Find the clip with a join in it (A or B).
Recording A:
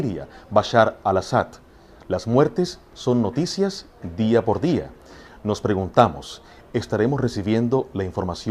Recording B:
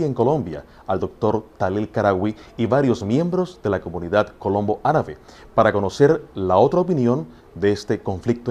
B